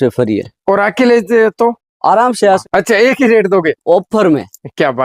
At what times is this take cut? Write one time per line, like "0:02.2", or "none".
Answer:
0:02.7